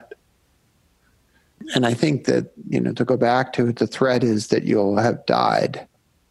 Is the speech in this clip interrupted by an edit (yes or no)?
yes